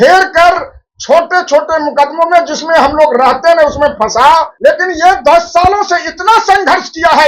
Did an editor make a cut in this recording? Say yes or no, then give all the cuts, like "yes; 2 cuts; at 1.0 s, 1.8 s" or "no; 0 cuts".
yes; 1 cut; at 4.5 s